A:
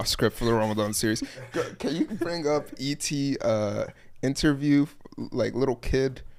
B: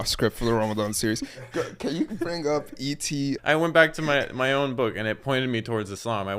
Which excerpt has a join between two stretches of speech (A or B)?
B